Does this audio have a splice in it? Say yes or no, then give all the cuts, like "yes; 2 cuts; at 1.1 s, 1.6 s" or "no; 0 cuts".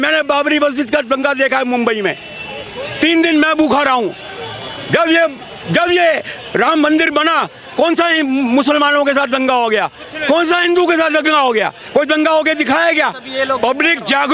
no; 0 cuts